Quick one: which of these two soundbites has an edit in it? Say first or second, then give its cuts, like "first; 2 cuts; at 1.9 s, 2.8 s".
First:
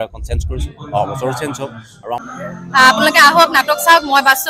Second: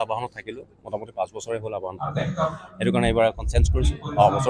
first; 1 cut; at 2.2 s